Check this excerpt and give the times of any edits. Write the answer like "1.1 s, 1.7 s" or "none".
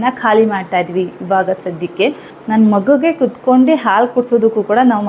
2.3 s